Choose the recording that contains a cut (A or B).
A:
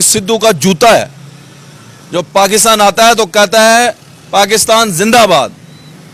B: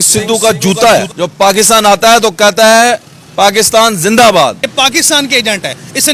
B